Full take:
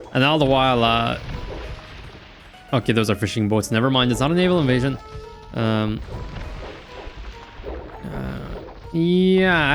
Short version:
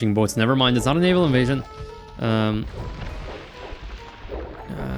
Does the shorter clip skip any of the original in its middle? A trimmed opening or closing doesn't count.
no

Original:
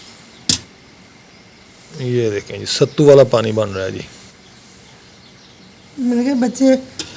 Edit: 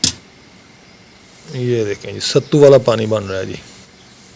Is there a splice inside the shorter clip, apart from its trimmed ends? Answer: no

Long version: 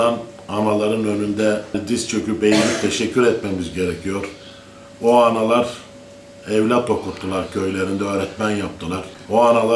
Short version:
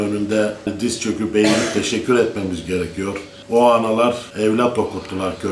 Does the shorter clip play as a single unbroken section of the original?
no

